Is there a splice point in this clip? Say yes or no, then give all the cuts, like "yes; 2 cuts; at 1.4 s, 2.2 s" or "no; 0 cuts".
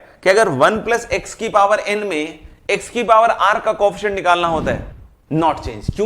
yes; 1 cut; at 4.9 s